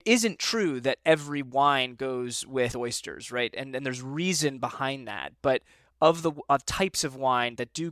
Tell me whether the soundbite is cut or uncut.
cut